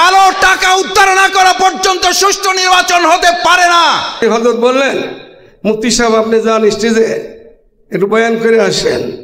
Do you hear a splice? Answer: yes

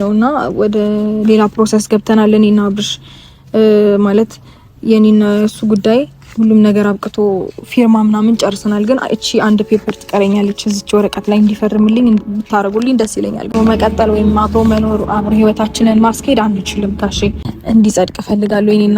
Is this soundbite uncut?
no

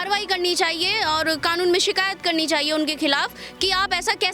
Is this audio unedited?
yes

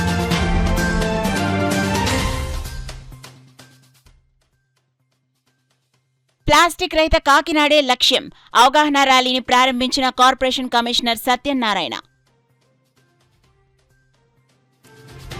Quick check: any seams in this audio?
no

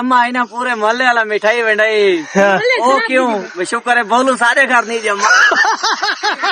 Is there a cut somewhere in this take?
no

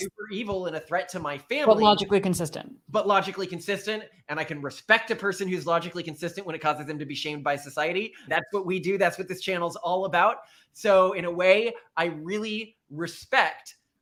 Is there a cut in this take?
no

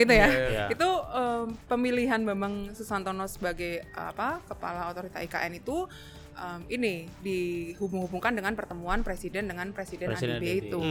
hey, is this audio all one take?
yes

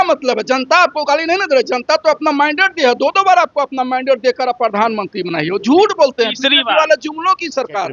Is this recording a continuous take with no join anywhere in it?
yes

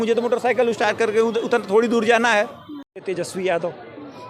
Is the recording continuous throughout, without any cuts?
no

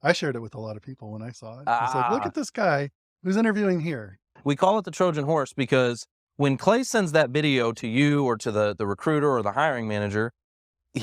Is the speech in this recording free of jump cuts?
no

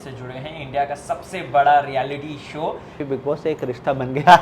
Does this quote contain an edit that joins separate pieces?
yes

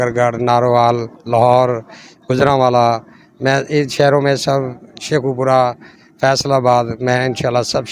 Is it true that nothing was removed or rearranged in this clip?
yes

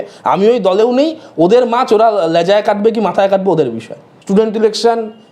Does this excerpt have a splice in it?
yes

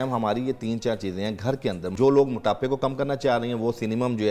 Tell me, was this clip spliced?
yes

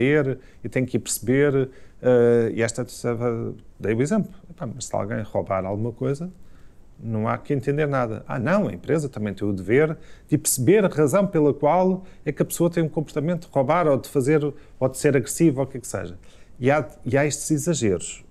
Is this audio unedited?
yes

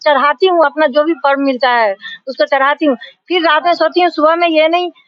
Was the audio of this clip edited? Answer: no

